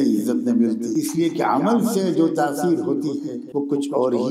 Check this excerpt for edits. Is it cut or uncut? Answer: cut